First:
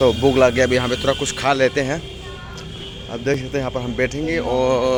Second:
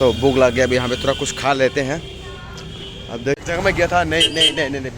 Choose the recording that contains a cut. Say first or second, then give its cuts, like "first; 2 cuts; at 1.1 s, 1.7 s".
second; 1 cut; at 3.3 s